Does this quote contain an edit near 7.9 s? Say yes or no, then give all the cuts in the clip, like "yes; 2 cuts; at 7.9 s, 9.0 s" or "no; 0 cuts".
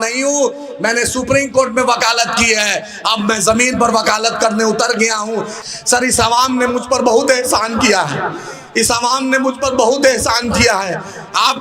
no; 1 cut; at 5.5 s